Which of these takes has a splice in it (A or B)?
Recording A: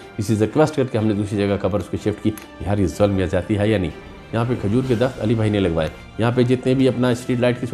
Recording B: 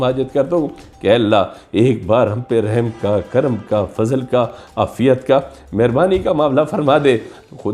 A